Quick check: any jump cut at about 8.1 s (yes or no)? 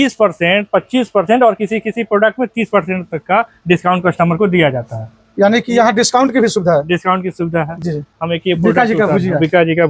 yes